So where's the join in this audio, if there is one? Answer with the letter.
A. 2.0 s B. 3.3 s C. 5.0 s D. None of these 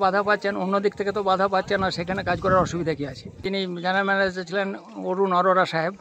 B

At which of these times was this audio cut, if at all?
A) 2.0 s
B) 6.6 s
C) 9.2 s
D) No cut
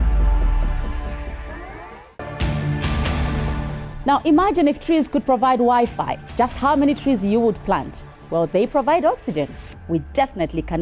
A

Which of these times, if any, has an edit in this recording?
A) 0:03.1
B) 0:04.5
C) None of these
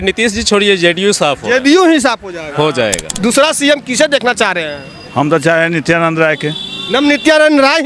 A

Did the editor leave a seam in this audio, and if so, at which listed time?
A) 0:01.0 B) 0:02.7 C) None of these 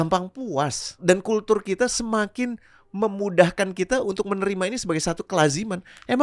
A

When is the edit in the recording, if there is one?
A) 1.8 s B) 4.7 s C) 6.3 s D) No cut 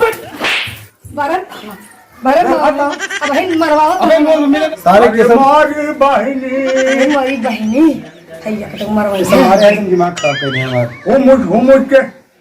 B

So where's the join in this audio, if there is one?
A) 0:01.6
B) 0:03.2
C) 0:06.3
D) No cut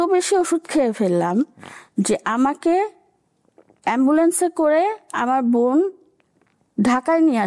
D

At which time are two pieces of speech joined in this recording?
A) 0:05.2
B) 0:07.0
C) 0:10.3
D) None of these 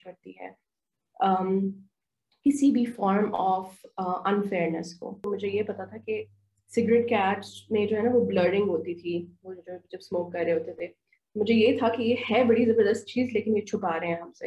A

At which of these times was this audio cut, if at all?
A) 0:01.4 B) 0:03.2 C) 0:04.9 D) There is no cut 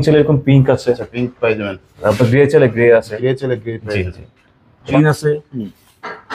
C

